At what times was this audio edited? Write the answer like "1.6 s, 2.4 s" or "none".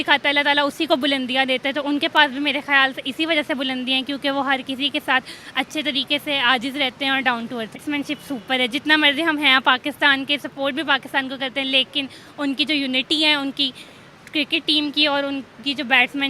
7.8 s